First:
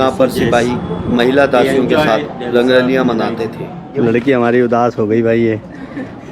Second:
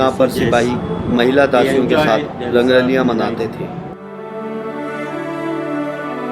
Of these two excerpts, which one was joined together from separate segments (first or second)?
first